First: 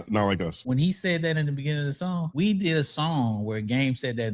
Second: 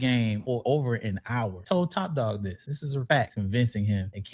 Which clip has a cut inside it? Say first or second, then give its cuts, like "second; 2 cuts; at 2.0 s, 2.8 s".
second; 1 cut; at 3.3 s